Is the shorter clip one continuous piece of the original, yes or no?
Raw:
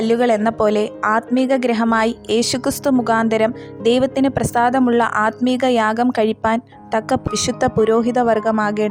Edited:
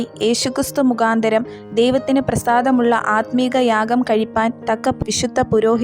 no